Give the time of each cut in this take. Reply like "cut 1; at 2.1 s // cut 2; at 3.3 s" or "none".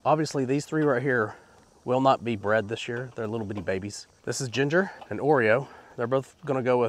cut 1; at 4.1 s // cut 2; at 5.0 s